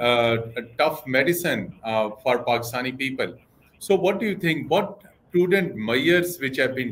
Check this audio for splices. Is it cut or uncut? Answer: uncut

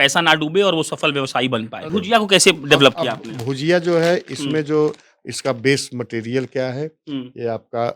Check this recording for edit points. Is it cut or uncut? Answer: cut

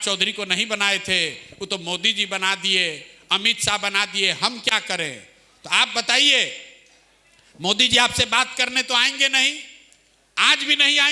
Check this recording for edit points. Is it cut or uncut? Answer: uncut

